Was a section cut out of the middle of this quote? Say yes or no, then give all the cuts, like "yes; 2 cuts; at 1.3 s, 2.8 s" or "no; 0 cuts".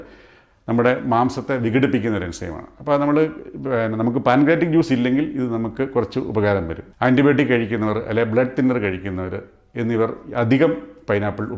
yes; 1 cut; at 6.8 s